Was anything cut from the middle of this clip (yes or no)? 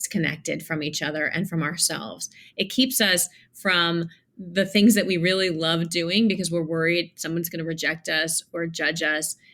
no